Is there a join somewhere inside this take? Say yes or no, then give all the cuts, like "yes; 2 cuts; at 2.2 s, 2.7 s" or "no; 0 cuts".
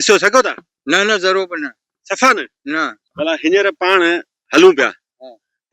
yes; 1 cut; at 3.0 s